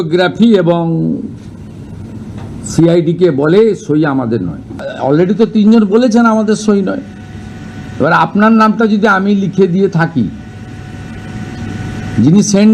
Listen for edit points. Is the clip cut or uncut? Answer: cut